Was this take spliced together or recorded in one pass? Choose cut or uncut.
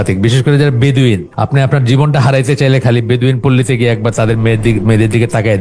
cut